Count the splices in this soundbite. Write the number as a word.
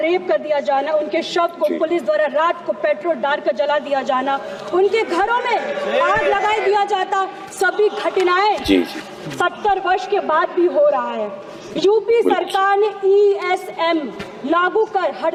zero